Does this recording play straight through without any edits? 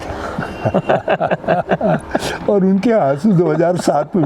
yes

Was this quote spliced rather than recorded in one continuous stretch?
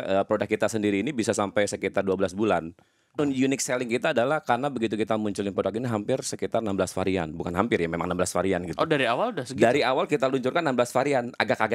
yes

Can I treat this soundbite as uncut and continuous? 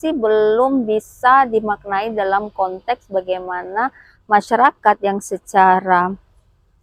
yes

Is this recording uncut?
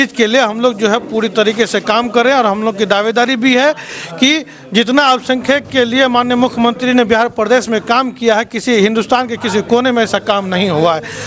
yes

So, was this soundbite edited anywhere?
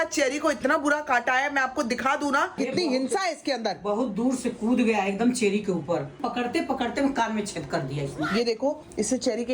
yes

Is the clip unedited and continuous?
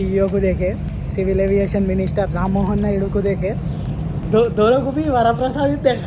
yes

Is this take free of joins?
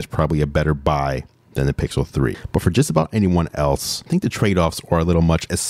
no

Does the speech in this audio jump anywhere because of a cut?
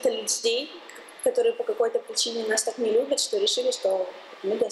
no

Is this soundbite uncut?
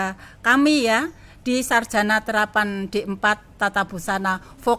yes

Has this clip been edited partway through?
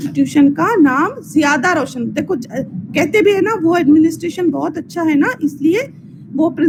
no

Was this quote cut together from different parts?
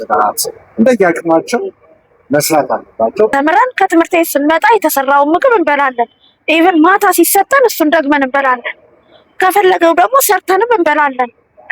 yes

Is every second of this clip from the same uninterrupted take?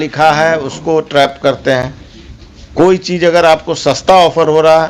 yes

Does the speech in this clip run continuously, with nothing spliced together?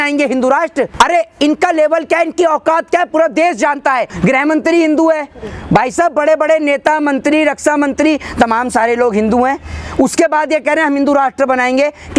no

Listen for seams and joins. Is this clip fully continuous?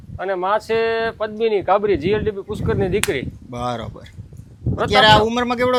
yes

